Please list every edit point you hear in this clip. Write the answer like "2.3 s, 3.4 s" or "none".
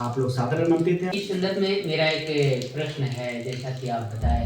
1.2 s